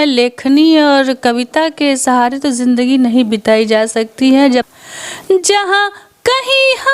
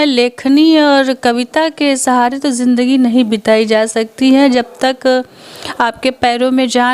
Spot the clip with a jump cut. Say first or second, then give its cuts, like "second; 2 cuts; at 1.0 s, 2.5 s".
first; 1 cut; at 4.7 s